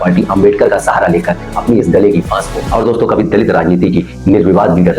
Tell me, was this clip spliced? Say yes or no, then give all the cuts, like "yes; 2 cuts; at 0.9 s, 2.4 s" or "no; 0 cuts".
yes; 1 cut; at 2.6 s